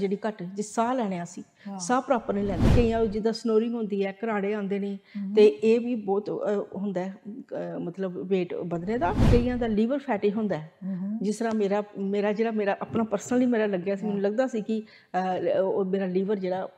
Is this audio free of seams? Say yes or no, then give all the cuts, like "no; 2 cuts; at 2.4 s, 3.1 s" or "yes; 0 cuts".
no; 2 cuts; at 2.7 s, 9.2 s